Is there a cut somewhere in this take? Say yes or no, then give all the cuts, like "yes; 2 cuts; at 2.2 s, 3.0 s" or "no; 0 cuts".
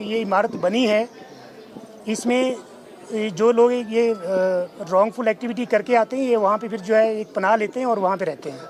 no; 0 cuts